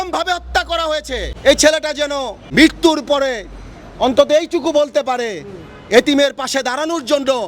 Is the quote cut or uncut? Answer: cut